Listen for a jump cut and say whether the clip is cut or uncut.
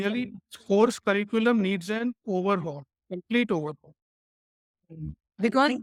uncut